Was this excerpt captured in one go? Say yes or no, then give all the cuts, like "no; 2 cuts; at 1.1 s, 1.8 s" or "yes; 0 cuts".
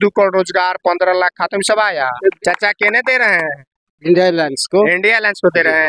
no; 1 cut; at 2.4 s